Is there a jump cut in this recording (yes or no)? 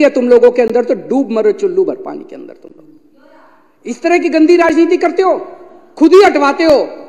no